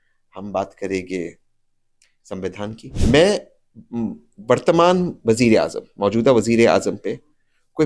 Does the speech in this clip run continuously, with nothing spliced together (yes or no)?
no